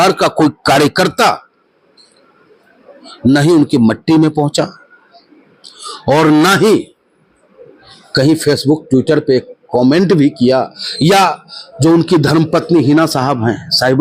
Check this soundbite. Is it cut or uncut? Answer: uncut